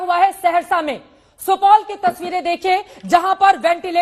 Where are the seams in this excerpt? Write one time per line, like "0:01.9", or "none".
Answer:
none